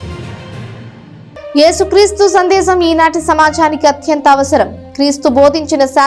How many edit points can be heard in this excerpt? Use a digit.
1